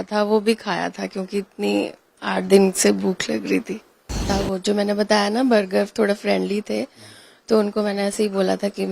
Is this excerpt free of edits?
no; 1 cut; at 4.2 s

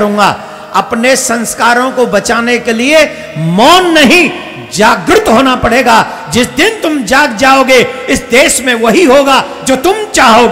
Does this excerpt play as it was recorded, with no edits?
yes; 0 cuts

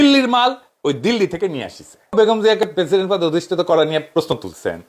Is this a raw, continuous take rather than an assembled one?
no; 1 cut; at 2.1 s

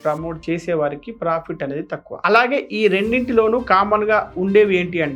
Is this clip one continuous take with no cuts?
yes; 0 cuts

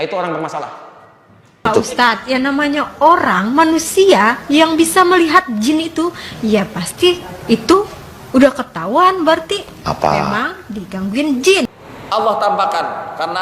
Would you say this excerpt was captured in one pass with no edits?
no; 2 cuts; at 1.6 s, 11.8 s

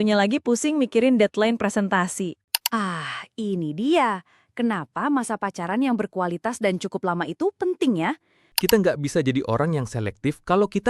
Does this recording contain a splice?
yes; 2 cuts; at 2.5 s, 8.4 s

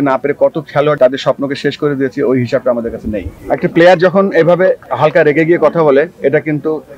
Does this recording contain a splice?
yes; 3 cuts; at 1.0 s, 3.3 s, 4.9 s

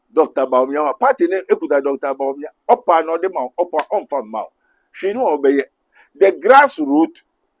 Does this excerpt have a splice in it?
no; 0 cuts

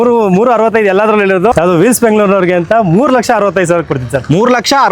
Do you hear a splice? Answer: yes; 1 cut; at 1.5 s

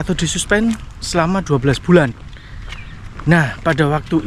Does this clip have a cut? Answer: no; 0 cuts

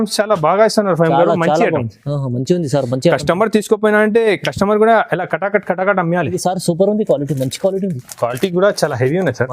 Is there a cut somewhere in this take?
yes; 1 cut; at 6.3 s

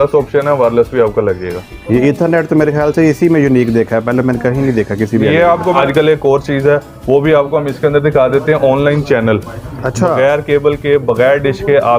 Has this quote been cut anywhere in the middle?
yes; 1 cut; at 5.8 s

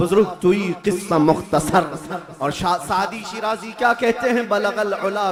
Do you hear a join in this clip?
no; 0 cuts

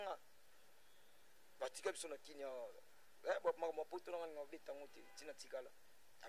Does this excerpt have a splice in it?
no; 0 cuts

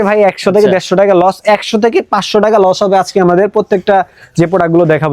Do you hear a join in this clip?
no; 0 cuts

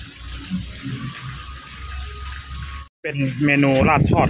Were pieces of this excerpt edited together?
no; 0 cuts

